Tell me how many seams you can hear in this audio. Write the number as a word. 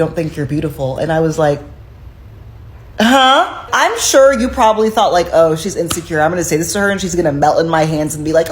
one